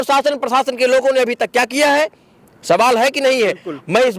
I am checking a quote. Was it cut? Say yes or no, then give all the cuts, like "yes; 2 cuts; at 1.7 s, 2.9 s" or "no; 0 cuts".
no; 0 cuts